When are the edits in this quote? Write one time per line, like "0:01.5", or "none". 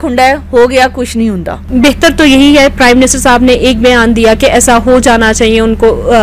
0:01.7